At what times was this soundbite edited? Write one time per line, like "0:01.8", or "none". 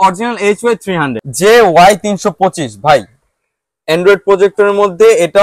0:01.2